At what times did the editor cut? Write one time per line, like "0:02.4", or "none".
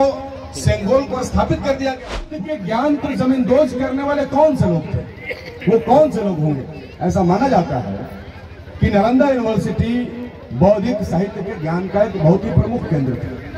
0:02.4